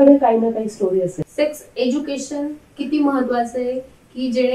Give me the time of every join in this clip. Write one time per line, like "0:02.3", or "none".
0:01.2